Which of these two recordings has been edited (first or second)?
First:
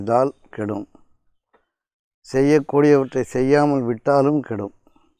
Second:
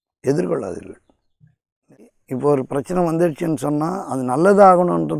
second